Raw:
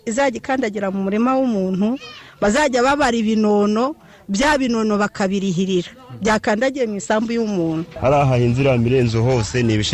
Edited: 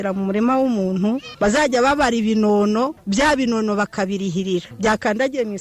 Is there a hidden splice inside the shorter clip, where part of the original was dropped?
yes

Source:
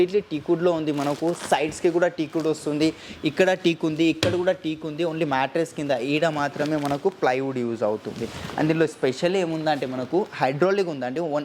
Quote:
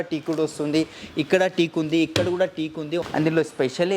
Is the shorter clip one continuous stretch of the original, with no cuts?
no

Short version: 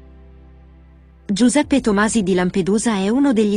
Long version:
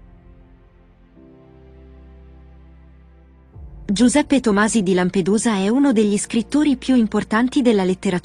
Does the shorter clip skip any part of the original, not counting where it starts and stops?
yes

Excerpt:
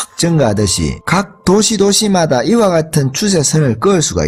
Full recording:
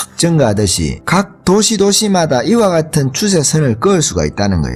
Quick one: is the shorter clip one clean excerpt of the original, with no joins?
yes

